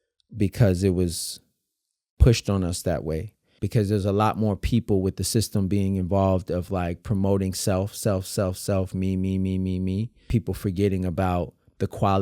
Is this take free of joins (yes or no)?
no